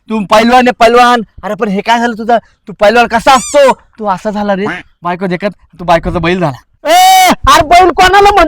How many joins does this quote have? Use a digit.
1